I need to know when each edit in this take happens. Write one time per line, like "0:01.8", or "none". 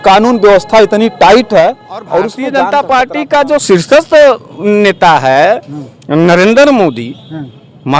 0:02.4